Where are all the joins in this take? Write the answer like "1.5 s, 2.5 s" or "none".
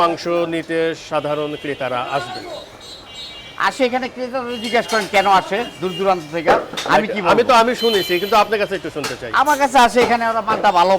none